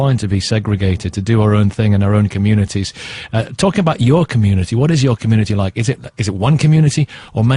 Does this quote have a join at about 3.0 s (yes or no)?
yes